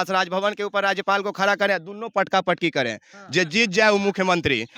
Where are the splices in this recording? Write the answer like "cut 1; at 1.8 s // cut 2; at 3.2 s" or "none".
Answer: none